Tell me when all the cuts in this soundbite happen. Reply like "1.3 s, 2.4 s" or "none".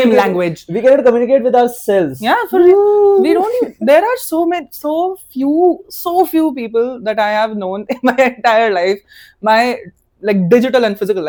none